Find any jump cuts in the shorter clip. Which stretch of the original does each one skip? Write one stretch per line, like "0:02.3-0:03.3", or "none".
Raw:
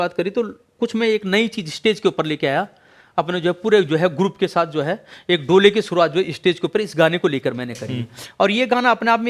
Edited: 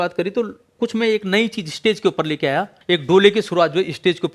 0:02.8-0:05.1

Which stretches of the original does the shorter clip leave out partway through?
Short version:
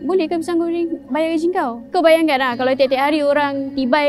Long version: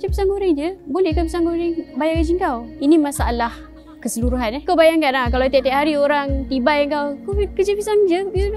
0:02.7-0:04.6

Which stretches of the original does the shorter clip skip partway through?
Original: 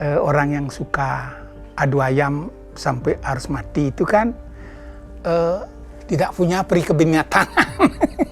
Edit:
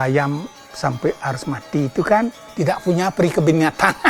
0:04.4-0:05.9

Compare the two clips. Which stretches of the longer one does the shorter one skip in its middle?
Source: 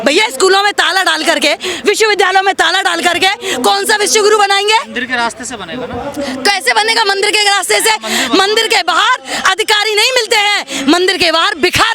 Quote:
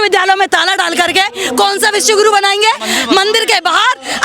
0:04.9-0:08.1

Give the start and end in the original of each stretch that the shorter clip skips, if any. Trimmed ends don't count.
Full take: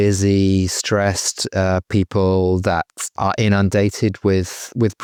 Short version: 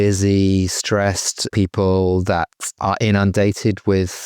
0:01.5-0:01.8

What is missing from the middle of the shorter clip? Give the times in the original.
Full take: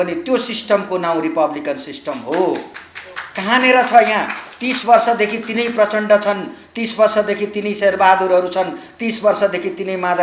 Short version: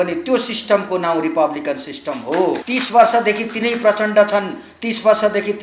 0:02.6-0:04.6

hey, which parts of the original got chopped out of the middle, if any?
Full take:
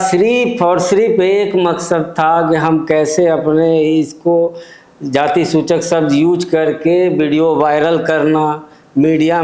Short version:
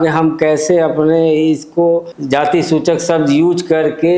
0:04.6-0:05.0

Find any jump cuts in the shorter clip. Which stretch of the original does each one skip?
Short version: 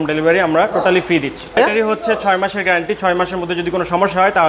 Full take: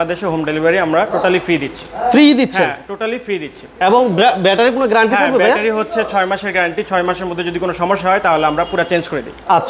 0:02.0-0:05.5

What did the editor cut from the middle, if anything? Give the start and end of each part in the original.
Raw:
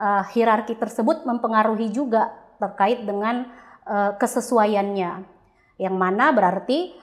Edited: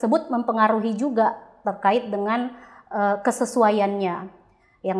none

